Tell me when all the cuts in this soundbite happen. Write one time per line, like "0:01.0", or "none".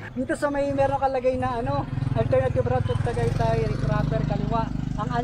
none